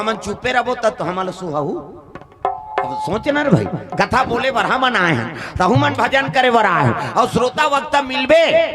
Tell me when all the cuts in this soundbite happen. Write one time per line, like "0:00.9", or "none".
none